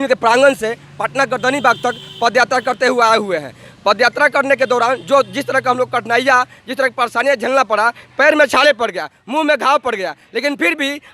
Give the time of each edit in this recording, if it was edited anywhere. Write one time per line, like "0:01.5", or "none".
none